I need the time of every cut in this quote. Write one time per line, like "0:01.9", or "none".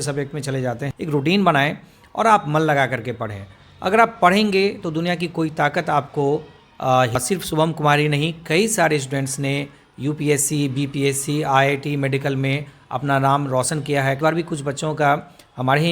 0:00.9
0:07.2
0:14.2